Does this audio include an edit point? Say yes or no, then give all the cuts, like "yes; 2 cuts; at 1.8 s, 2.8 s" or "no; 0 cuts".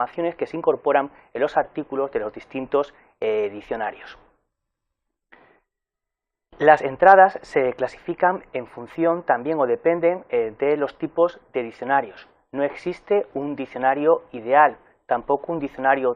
no; 0 cuts